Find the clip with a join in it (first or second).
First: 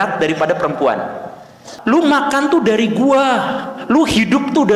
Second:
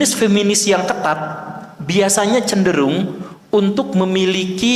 first